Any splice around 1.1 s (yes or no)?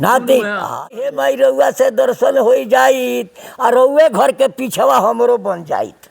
yes